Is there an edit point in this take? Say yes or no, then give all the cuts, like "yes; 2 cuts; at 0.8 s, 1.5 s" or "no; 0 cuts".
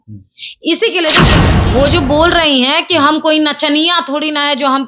yes; 1 cut; at 1.4 s